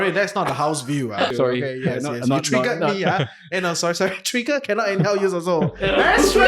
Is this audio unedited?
no; 1 cut; at 1.3 s

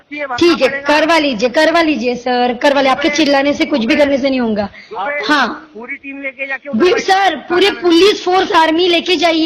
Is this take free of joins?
yes; 0 cuts

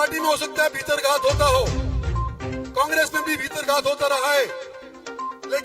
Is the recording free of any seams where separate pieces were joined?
yes; 0 cuts

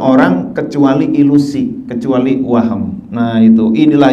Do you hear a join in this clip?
no; 0 cuts

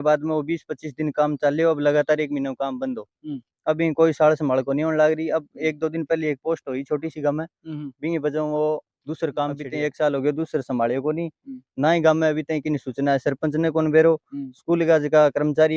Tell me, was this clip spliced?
yes; 1 cut; at 9.6 s

